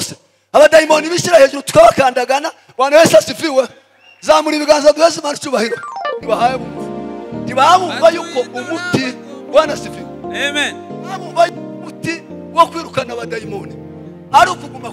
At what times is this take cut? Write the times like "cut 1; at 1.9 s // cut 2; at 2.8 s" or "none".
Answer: cut 1; at 6.2 s